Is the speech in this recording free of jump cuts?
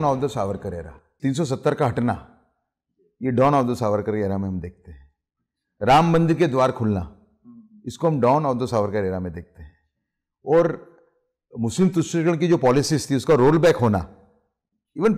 no; 1 cut; at 1.1 s

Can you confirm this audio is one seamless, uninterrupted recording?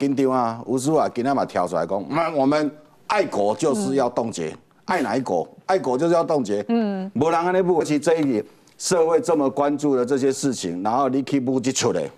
no; 1 cut; at 7.8 s

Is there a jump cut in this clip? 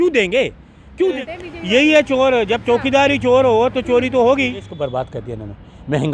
yes; 2 cuts; at 1.2 s, 4.8 s

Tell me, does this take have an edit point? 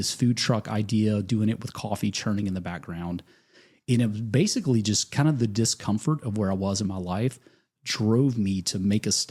no; 0 cuts

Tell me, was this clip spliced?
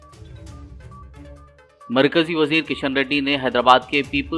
yes; 1 cut; at 1.3 s

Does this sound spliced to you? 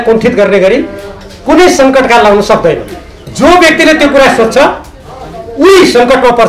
no; 0 cuts

